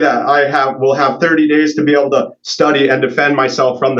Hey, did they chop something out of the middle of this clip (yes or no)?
no